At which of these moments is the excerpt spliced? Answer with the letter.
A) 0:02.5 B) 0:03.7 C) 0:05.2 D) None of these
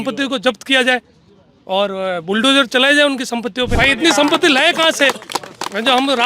B